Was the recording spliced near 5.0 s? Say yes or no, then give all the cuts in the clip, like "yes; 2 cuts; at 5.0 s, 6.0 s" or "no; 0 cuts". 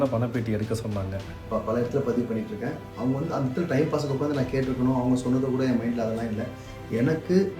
no; 1 cut; at 1.4 s